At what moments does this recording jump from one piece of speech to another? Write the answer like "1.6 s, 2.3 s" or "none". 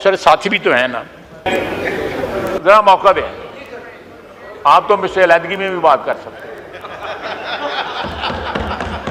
1.4 s